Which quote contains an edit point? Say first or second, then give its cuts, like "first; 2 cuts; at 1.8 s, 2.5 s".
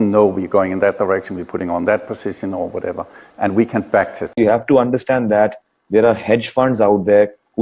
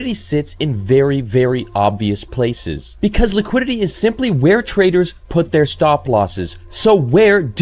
first; 1 cut; at 4.2 s